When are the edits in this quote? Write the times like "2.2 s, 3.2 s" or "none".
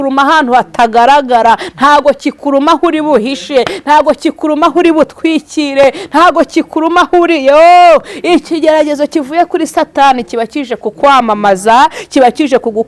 none